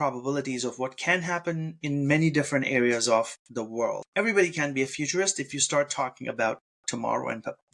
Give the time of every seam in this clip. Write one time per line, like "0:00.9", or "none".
0:04.0